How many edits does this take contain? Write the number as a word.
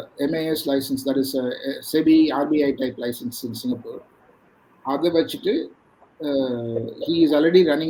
zero